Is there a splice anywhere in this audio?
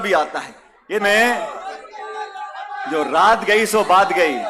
yes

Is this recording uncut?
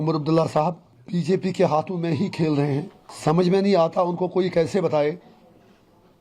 no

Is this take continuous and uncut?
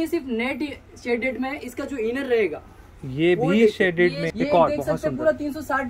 no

